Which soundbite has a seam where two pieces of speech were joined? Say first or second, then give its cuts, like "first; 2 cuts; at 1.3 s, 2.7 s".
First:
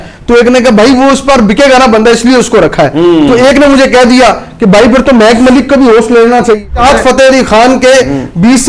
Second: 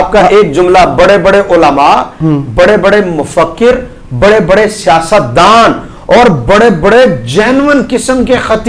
first; 1 cut; at 6.7 s